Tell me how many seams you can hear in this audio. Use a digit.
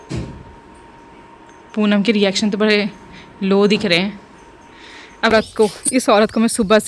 1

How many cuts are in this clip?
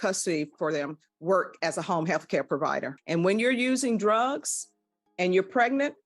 1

